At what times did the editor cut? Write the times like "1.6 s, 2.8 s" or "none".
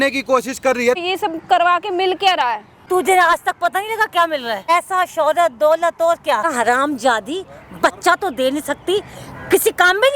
1.0 s, 2.8 s, 4.7 s, 6.5 s